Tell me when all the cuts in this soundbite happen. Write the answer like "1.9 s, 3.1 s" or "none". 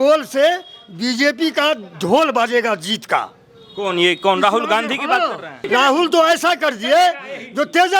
5.6 s